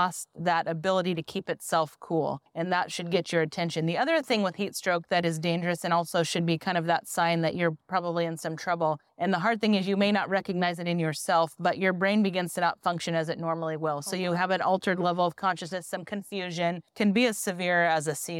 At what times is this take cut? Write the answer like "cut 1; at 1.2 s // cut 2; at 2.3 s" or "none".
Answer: cut 1; at 2.5 s // cut 2; at 9.1 s // cut 3; at 16.9 s